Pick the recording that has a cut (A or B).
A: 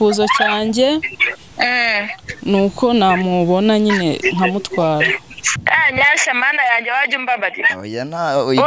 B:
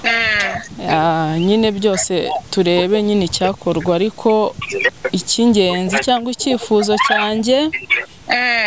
A